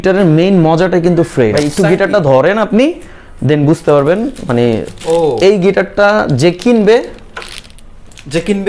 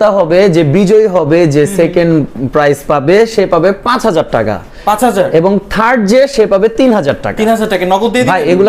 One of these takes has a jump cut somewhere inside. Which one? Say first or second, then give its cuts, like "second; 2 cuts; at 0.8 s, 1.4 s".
first; 1 cut; at 1.6 s